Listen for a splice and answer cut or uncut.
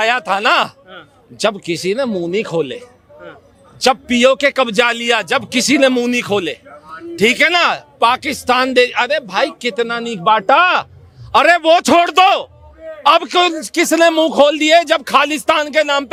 uncut